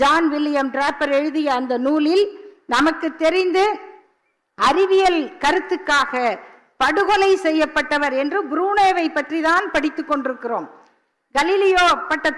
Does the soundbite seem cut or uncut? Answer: uncut